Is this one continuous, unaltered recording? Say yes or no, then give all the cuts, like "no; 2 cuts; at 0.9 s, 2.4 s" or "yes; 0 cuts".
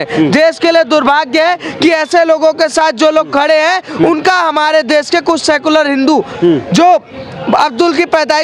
yes; 0 cuts